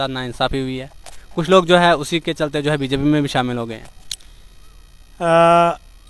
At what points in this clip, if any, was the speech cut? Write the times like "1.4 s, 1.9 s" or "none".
none

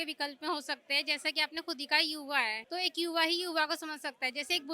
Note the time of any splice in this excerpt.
2.6 s

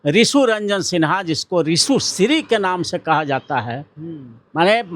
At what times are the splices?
none

